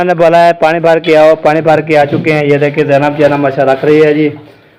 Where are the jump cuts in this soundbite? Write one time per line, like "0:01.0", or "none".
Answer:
none